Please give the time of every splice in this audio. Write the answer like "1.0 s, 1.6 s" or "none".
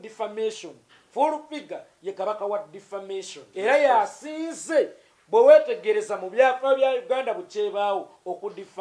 3.4 s